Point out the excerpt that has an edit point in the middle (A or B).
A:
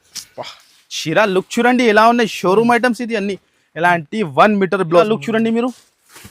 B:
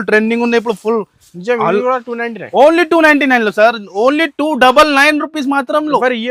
A